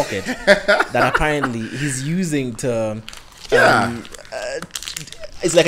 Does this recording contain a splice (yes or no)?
no